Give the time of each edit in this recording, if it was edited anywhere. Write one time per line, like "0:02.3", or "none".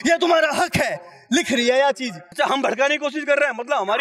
0:02.3